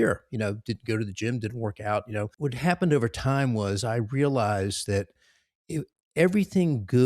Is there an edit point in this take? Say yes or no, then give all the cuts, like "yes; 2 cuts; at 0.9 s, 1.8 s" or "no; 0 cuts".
yes; 1 cut; at 2.3 s